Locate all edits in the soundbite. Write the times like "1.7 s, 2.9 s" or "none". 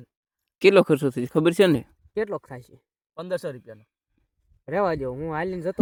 none